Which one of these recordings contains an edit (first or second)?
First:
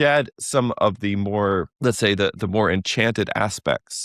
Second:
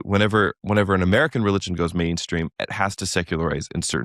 first